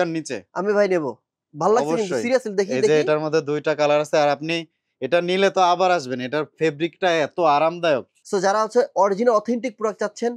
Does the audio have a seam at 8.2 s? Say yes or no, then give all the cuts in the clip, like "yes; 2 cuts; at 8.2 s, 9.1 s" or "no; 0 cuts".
yes; 1 cut; at 8.2 s